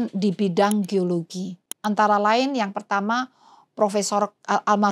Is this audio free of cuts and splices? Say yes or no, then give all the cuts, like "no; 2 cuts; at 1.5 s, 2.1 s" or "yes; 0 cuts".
yes; 0 cuts